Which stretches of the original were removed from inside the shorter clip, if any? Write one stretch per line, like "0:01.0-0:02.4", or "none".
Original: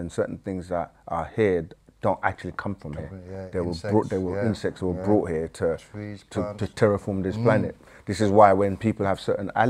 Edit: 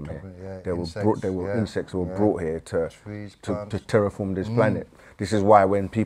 none